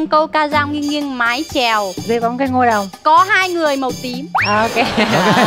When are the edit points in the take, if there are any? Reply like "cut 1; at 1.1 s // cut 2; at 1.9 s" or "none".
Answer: cut 1; at 2.0 s // cut 2; at 4.3 s